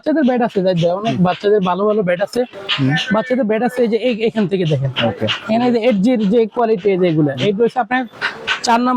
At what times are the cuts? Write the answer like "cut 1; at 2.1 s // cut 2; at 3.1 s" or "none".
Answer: none